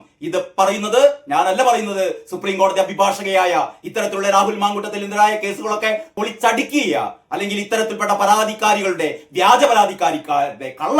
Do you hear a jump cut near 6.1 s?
yes; 1 cut; at 6.1 s

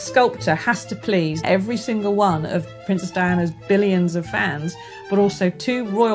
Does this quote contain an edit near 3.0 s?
no; 1 cut; at 1.4 s

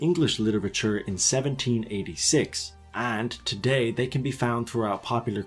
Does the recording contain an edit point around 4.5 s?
yes; 1 cut; at 4.5 s

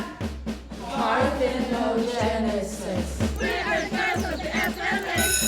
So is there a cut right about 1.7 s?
no; 1 cut; at 4.4 s

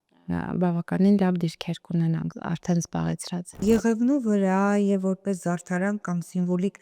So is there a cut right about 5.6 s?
no; 2 cuts; at 2.3 s, 3.6 s

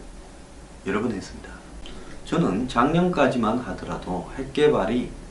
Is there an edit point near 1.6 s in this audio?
no; 0 cuts

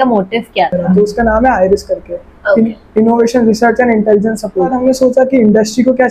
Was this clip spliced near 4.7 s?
yes; 2 cuts; at 1.0 s, 4.7 s

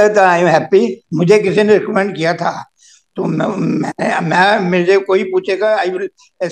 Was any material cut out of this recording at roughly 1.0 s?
yes; 1 cut; at 1.0 s

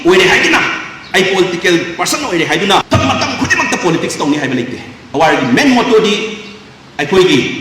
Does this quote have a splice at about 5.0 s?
yes; 2 cuts; at 2.8 s, 5.0 s

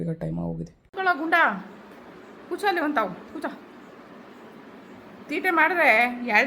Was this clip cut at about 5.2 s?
no; 1 cut; at 0.9 s

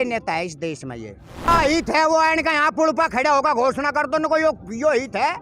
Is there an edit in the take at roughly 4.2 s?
no; 1 cut; at 1.5 s

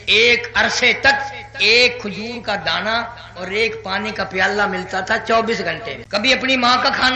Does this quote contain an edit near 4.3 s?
no; 1 cut; at 5.9 s

